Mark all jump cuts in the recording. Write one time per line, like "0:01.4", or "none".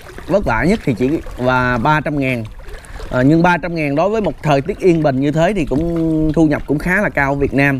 none